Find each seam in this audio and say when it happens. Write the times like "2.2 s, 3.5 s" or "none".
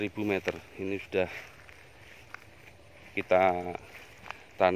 none